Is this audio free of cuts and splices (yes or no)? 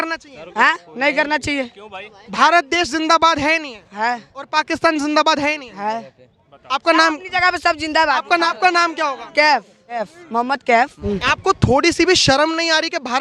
no